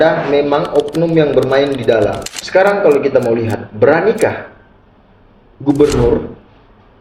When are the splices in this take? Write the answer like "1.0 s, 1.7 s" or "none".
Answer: 2.3 s